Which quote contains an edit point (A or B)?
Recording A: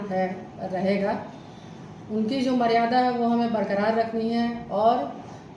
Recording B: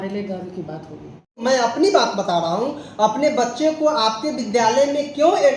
B